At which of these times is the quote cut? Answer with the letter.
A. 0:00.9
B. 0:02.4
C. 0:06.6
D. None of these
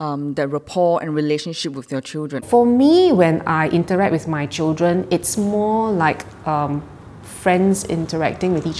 B